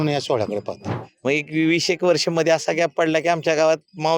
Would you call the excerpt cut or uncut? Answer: cut